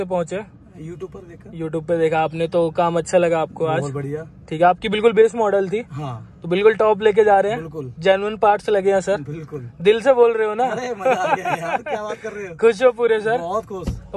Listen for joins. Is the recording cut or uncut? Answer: uncut